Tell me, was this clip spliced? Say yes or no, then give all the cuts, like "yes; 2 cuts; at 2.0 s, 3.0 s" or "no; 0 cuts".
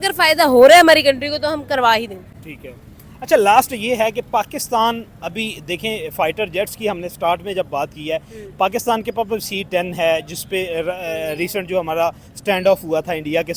no; 0 cuts